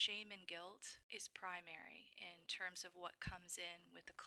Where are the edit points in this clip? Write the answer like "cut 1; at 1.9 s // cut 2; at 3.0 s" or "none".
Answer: cut 1; at 0.9 s // cut 2; at 2.4 s